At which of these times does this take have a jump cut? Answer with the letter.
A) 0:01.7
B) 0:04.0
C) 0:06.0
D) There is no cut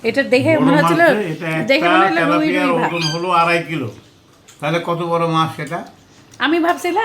D